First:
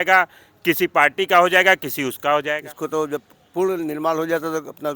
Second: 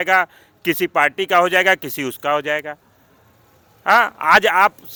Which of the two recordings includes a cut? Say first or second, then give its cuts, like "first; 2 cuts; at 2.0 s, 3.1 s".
first; 1 cut; at 2.7 s